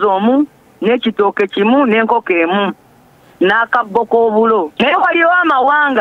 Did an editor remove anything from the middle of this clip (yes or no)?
yes